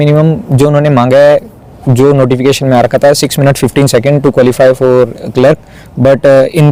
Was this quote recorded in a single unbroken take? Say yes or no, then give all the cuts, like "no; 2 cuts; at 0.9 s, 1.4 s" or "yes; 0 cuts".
yes; 0 cuts